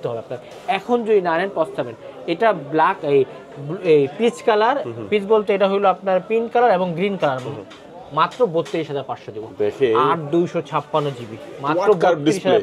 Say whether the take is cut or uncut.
uncut